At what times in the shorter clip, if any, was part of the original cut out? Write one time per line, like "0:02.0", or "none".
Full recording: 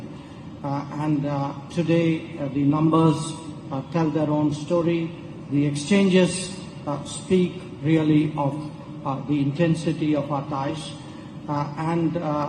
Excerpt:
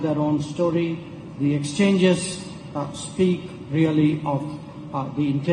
none